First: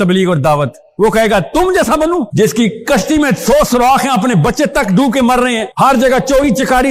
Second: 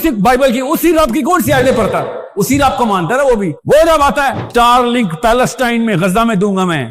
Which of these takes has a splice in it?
second; 1 cut; at 4.4 s

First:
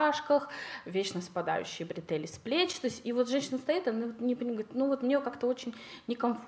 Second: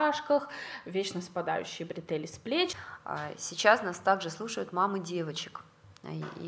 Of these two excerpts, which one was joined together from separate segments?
second; 1 cut; at 2.8 s

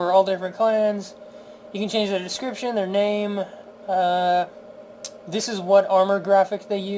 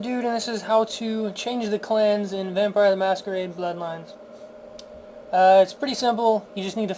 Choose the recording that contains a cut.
first; 1 cut; at 3.1 s

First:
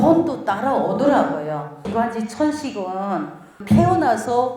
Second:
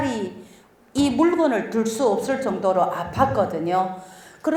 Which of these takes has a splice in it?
first; 2 cuts; at 1.9 s, 3.6 s

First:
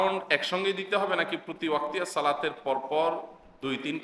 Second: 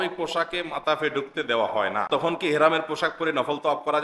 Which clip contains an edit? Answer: second; 1 cut; at 2.1 s

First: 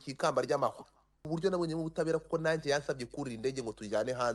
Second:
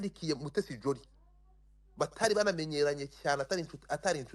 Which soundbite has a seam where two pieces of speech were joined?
first; 1 cut; at 1.3 s

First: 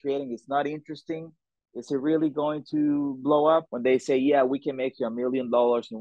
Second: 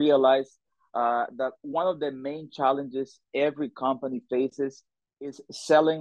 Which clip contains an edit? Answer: first; 1 cut; at 3.7 s

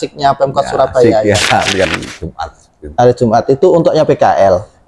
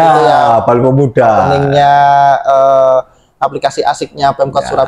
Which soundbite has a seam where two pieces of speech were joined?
first; 1 cut; at 1.9 s

